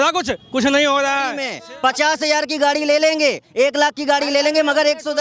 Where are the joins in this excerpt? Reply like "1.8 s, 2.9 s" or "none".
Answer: 1.5 s

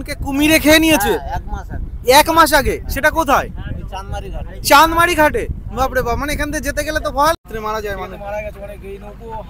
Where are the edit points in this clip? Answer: 7.4 s

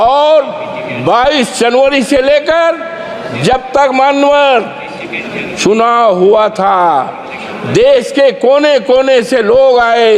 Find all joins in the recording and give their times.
none

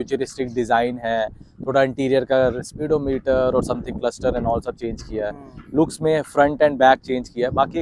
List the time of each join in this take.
none

